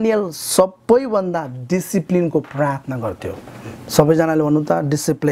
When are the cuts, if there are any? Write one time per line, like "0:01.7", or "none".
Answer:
none